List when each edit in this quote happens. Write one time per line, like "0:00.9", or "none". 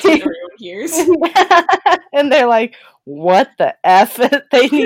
none